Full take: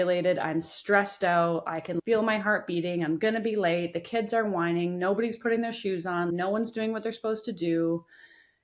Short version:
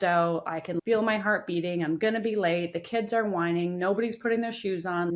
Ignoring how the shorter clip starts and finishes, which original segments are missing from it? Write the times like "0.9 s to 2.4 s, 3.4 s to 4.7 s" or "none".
none